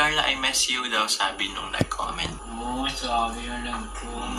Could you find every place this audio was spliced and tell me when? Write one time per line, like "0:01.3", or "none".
none